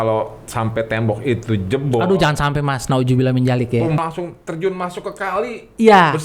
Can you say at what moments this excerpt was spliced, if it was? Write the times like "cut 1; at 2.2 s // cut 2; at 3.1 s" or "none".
cut 1; at 4.0 s

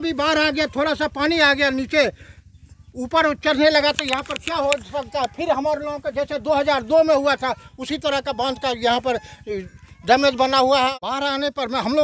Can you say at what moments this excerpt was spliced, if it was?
cut 1; at 11.0 s

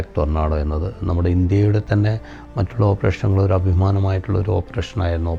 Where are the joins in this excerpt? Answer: none

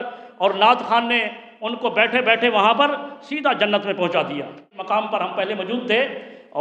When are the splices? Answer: cut 1; at 4.8 s

